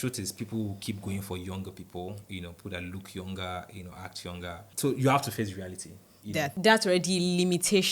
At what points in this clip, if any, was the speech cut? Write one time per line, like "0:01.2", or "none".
0:04.7
0:06.5